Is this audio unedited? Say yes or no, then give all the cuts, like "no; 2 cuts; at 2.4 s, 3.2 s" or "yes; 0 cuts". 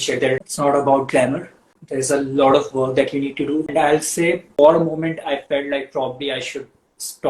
no; 1 cut; at 4.0 s